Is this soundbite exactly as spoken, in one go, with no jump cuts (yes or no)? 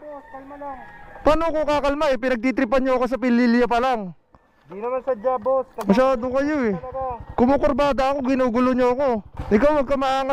no